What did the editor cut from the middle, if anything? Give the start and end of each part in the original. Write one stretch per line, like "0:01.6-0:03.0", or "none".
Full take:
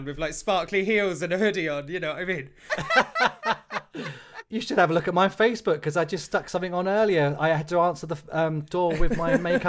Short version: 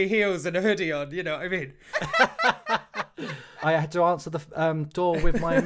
0:04.4-0:07.4